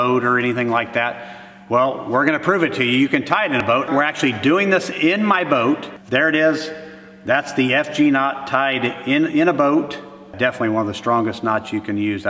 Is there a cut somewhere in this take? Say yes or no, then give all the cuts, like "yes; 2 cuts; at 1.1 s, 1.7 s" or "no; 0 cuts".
yes; 3 cuts; at 3.7 s, 6.0 s, 10.4 s